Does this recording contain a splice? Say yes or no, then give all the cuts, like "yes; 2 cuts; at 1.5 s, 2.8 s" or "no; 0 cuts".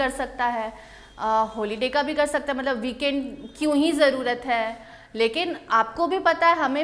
no; 0 cuts